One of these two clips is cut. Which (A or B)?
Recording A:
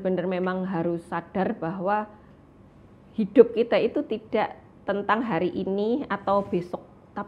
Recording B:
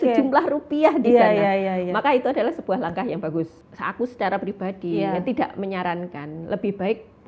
B